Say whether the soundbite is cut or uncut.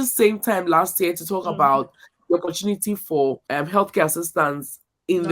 cut